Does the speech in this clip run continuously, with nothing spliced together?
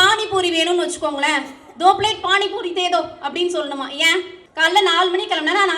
no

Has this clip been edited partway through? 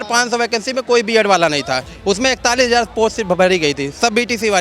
no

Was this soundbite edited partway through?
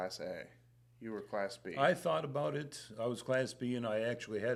no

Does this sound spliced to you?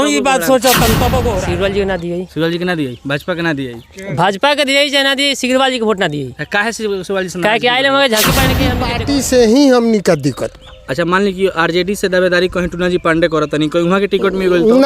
yes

